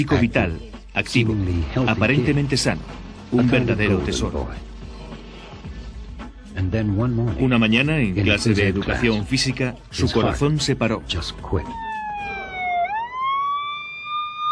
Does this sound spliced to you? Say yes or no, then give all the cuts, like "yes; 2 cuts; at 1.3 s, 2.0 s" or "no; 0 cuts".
yes; 1 cut; at 1.1 s